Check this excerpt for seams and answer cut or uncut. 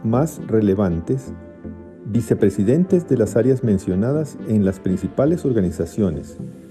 uncut